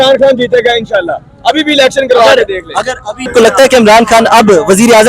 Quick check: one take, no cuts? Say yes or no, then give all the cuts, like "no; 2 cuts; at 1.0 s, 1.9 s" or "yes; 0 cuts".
no; 1 cut; at 3.3 s